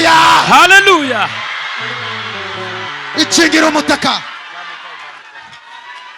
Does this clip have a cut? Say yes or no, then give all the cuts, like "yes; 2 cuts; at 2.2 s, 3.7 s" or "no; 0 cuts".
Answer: no; 0 cuts